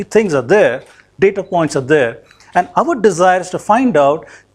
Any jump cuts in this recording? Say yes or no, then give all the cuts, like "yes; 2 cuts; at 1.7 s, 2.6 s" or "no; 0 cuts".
no; 0 cuts